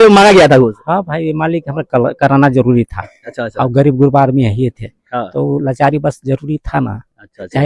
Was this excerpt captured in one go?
yes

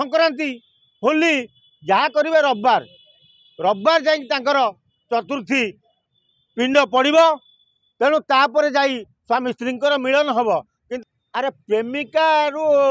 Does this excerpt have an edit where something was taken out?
yes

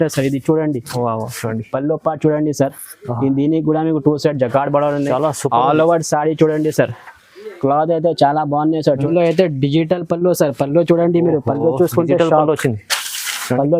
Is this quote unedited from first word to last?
no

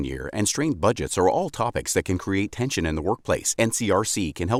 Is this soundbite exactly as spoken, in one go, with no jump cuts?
yes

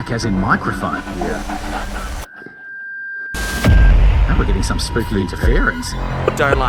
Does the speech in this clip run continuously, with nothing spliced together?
yes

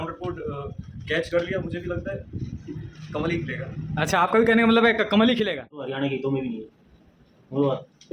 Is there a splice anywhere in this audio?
yes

